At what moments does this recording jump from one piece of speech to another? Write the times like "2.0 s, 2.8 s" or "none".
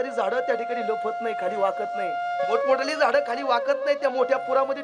2.5 s